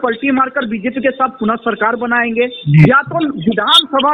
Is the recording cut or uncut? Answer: uncut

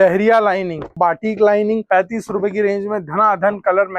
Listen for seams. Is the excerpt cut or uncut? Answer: cut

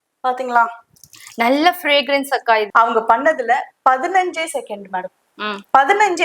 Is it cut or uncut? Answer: cut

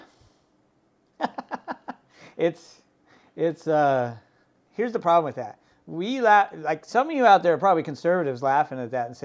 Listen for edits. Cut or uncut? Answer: cut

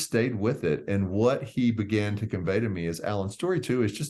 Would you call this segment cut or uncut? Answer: uncut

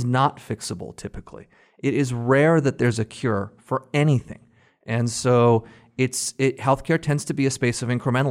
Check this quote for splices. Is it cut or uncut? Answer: uncut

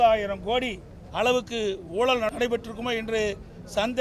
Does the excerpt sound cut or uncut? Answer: cut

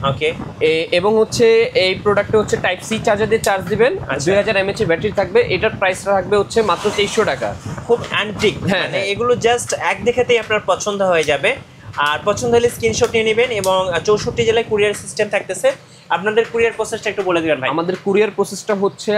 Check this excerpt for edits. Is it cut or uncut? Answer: uncut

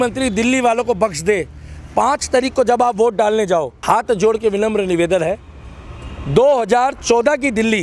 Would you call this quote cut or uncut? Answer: cut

